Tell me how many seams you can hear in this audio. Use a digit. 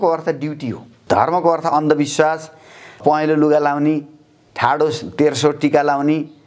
2